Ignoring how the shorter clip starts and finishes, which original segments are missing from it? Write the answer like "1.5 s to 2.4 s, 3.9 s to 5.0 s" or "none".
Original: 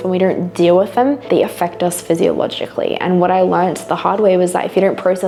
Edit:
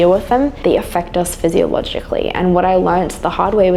none